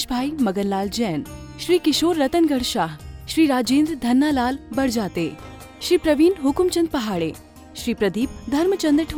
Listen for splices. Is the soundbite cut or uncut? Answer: uncut